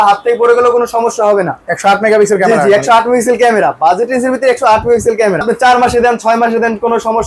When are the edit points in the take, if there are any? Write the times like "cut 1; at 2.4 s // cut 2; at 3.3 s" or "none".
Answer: cut 1; at 5.4 s